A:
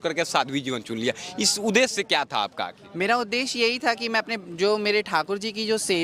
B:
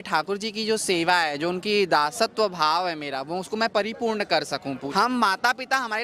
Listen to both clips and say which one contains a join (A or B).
B